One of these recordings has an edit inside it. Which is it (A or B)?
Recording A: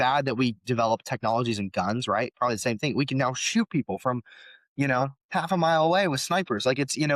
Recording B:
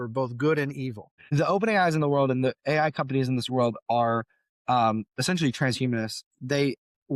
B